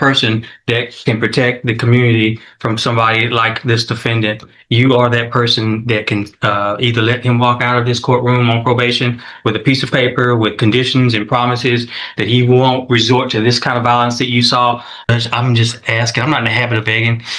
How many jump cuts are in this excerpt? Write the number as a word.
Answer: one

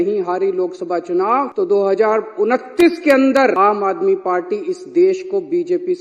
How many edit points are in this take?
two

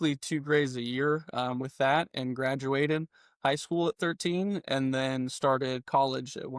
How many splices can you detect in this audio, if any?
zero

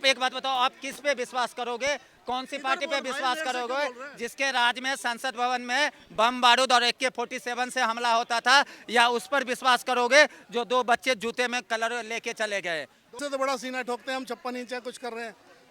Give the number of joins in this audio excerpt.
one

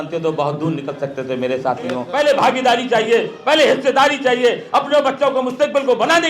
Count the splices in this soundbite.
one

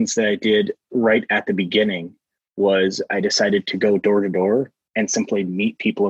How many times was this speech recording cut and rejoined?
zero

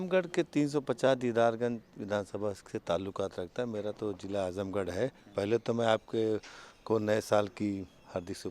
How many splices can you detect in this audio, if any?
zero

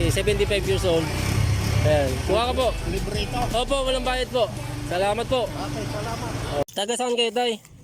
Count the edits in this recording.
one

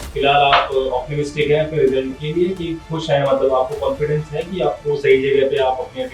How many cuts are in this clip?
zero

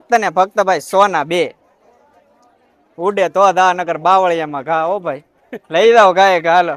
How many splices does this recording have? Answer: zero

